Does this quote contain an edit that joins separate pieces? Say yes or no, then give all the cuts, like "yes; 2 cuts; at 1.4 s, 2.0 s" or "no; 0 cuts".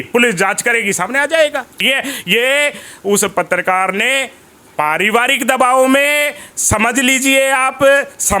yes; 1 cut; at 1.8 s